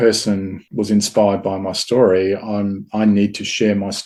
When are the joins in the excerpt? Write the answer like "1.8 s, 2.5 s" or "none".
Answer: none